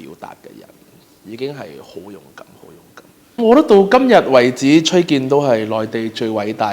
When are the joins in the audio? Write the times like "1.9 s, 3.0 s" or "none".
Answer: 3.4 s